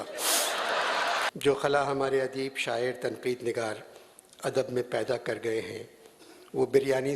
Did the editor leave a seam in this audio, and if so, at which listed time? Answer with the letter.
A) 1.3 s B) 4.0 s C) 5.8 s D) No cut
A